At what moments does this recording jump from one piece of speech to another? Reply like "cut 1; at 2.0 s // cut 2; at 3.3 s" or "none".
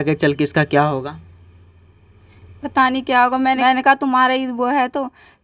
cut 1; at 3.6 s